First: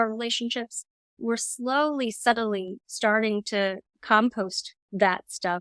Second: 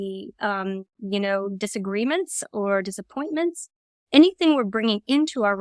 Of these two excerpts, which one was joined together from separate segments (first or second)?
first